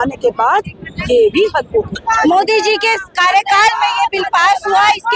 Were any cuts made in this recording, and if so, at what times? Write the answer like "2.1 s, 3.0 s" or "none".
1.9 s